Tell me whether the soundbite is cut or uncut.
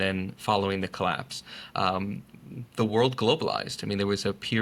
uncut